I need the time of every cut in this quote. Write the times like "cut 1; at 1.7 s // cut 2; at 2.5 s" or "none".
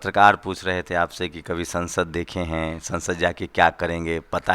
none